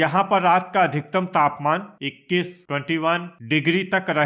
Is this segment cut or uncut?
uncut